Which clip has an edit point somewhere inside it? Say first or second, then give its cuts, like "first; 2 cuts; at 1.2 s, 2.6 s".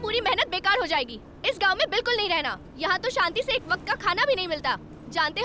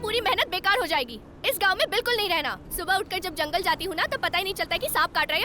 second; 1 cut; at 2.6 s